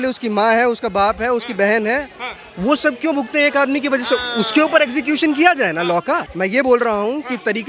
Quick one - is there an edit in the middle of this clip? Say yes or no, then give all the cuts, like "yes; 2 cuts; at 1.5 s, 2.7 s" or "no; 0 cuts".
yes; 1 cut; at 6.3 s